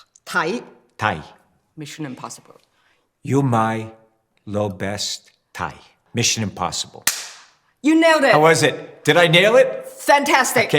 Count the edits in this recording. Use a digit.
1